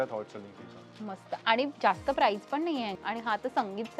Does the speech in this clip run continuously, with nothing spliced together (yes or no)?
no